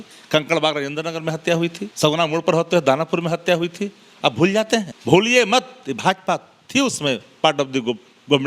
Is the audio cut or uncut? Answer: cut